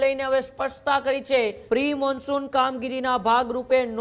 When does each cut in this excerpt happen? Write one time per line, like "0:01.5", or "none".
0:01.6